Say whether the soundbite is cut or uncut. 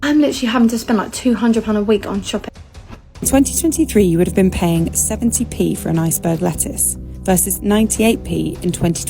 cut